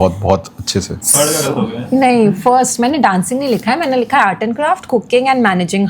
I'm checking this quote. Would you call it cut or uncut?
cut